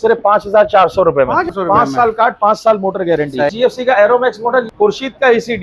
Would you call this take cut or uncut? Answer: cut